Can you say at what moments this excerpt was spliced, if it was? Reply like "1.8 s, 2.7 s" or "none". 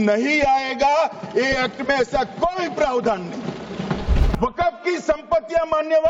4.3 s